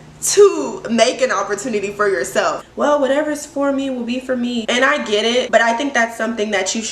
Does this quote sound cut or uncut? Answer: cut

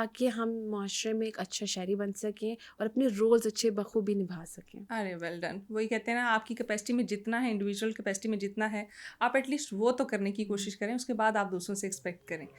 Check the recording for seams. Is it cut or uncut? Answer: uncut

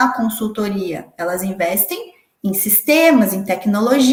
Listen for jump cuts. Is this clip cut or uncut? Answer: uncut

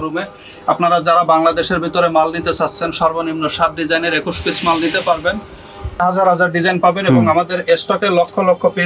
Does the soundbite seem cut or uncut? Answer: cut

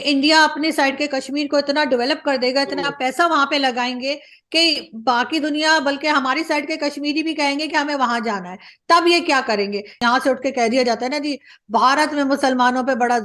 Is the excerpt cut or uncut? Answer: cut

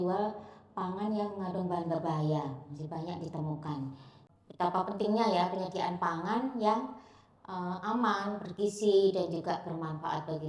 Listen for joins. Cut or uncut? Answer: cut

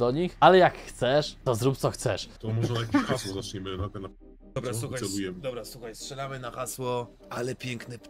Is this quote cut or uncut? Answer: cut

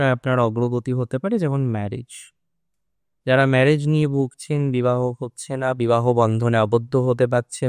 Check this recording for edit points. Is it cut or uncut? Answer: uncut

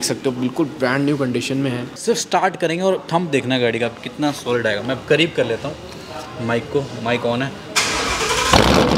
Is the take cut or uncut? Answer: cut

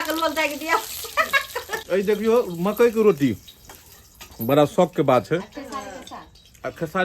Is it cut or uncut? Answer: cut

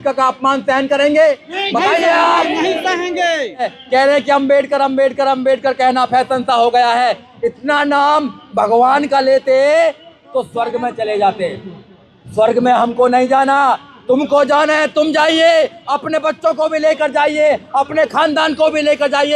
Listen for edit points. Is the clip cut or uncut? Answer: cut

